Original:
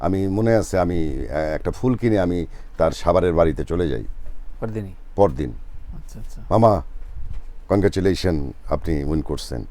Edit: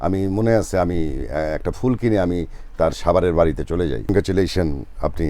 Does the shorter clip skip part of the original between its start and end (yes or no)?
yes